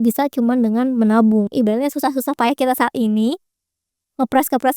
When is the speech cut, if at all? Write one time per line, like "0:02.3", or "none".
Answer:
0:01.5